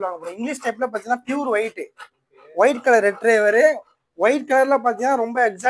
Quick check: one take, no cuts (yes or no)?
yes